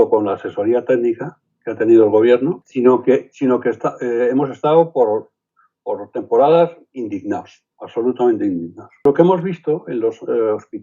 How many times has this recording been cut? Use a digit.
1